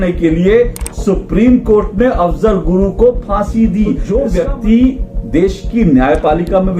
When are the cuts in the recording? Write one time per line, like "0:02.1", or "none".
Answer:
0:04.0